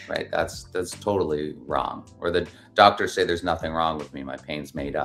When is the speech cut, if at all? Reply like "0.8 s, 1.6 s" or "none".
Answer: none